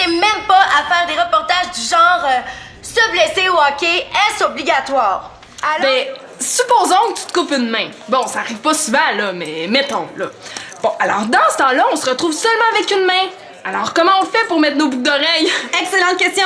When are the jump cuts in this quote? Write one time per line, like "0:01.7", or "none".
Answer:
0:05.6